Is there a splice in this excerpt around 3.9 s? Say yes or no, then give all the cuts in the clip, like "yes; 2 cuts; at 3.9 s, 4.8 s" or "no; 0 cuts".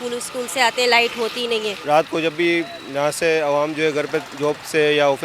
no; 1 cut; at 1.8 s